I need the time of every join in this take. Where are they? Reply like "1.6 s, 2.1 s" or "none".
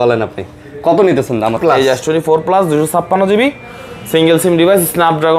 1.6 s